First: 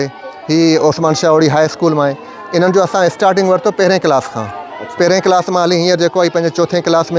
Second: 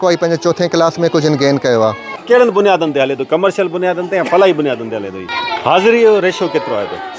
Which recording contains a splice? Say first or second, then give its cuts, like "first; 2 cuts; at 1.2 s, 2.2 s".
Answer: second; 2 cuts; at 2.1 s, 5.2 s